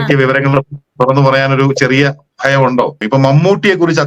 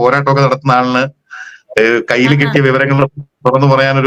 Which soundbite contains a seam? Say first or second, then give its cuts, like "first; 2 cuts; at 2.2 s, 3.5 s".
first; 1 cut; at 3.0 s